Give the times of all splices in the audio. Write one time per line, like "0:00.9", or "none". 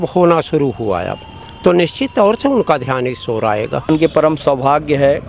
0:03.9

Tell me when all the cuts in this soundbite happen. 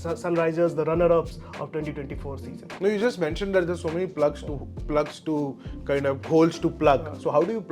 none

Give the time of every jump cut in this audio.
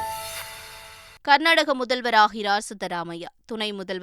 0:01.0

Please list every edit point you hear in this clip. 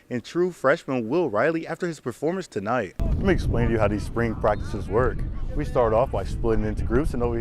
0:03.0

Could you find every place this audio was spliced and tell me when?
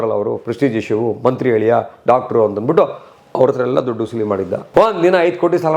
0:04.6

